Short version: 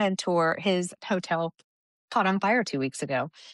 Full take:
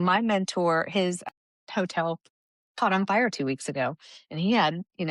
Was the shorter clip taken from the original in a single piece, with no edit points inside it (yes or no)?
no